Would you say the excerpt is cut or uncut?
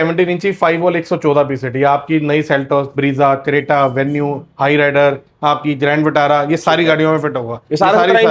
uncut